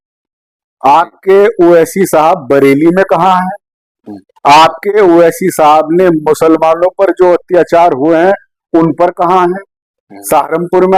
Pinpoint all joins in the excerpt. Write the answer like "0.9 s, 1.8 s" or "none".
none